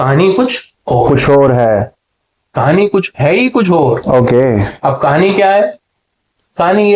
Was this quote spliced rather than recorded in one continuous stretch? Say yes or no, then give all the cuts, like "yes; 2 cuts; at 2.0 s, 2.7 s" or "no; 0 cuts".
no; 0 cuts